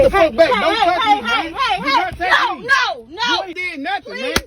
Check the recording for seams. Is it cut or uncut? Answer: cut